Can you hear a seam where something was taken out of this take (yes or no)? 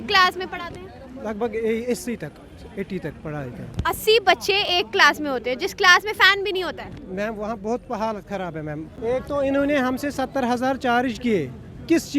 yes